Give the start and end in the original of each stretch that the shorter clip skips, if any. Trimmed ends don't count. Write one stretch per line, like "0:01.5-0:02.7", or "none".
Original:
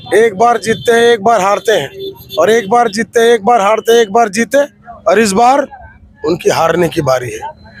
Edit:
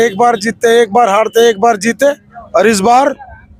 none